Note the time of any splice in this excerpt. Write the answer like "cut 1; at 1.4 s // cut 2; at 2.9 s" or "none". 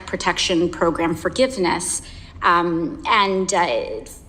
none